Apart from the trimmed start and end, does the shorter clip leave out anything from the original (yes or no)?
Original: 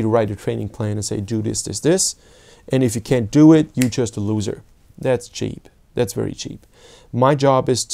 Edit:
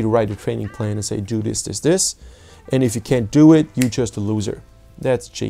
no